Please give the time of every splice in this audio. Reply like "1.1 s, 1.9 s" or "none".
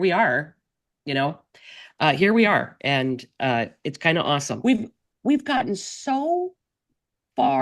4.5 s